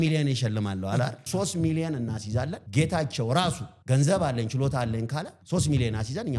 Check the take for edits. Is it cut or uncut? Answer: cut